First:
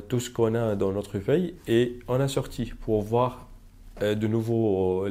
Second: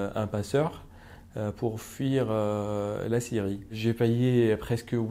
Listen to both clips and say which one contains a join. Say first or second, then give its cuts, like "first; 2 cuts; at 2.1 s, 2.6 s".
second; 1 cut; at 3.7 s